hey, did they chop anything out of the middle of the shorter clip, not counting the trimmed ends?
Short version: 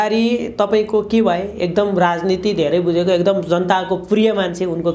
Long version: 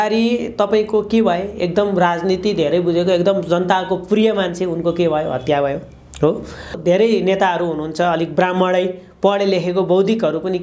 no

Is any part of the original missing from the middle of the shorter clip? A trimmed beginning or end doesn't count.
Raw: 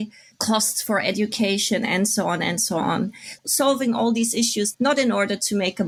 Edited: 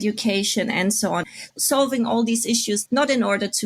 yes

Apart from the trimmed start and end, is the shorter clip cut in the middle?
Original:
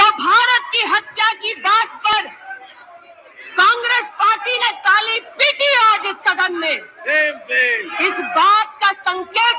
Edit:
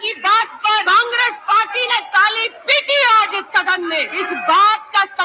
yes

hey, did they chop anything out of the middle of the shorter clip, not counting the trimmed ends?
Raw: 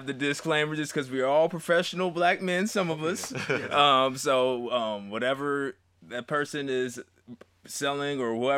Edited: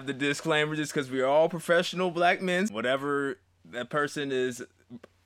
yes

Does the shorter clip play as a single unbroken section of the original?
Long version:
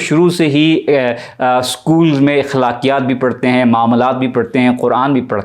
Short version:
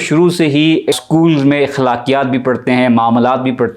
no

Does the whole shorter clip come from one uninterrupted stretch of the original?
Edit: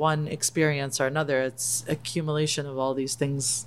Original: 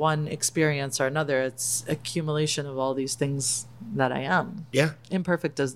yes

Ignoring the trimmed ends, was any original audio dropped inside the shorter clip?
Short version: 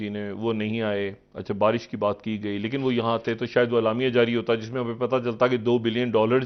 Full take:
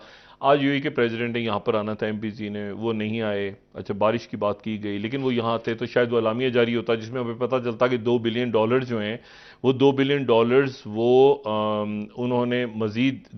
no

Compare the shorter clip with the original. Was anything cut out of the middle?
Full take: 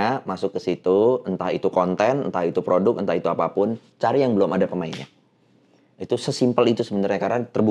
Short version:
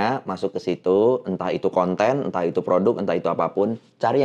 no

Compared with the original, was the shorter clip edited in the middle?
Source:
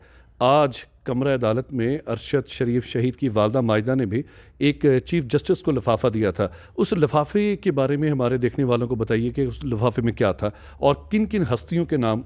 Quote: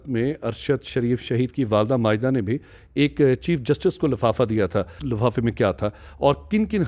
yes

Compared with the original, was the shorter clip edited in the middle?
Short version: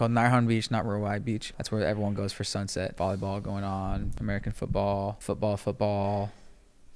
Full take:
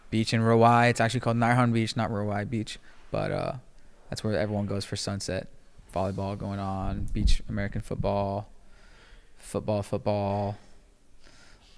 yes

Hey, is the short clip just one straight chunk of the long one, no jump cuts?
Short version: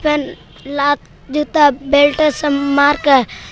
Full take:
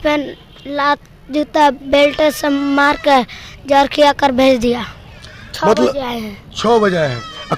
yes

